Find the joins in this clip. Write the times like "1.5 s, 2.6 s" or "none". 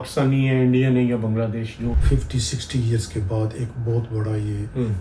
2.0 s

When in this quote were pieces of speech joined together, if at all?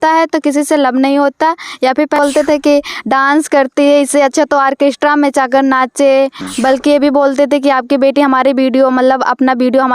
2.2 s, 6.4 s

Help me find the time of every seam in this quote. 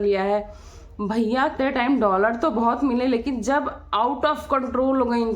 1.5 s

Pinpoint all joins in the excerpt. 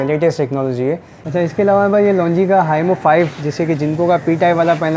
1.1 s

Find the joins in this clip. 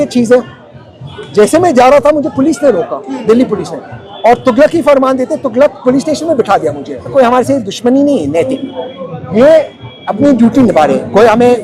7.1 s

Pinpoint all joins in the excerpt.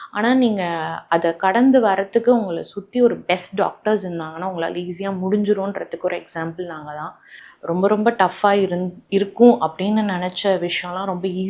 7.5 s

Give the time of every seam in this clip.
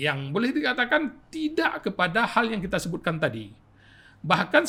none

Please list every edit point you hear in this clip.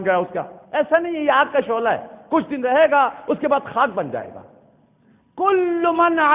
none

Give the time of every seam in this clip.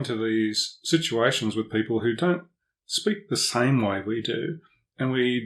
none

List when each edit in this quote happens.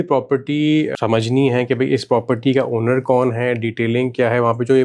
0.9 s

